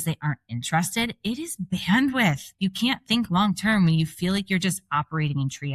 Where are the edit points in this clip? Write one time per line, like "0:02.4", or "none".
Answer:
0:02.5